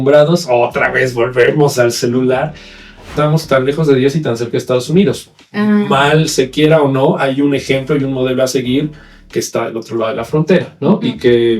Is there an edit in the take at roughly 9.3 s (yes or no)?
no